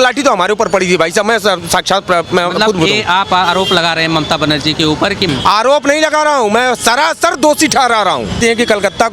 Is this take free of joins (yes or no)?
no